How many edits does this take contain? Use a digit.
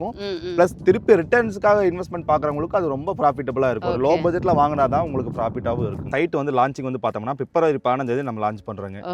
2